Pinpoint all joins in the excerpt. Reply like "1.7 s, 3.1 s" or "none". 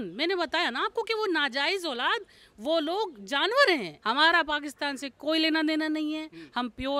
3.9 s